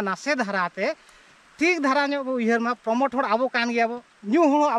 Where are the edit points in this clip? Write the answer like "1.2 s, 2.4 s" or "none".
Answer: none